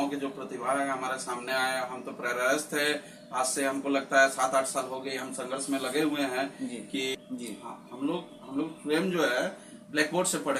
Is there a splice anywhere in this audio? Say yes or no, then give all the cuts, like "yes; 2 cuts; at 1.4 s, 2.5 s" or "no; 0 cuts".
yes; 1 cut; at 7.1 s